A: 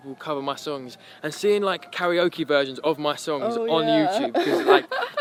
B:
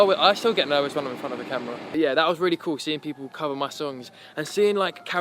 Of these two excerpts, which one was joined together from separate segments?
B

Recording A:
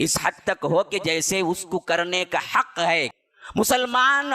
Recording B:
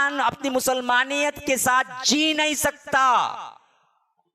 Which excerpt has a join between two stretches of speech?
A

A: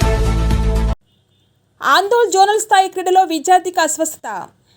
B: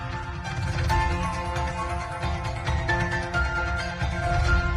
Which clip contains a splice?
A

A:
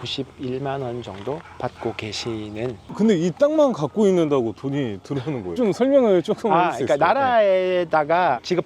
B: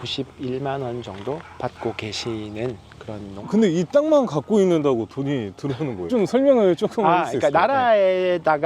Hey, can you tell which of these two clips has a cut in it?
A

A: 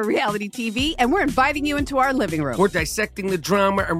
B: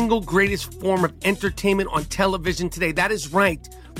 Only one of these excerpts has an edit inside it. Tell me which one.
A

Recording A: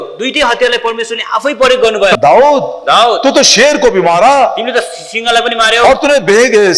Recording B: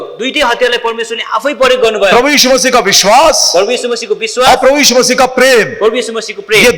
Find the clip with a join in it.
A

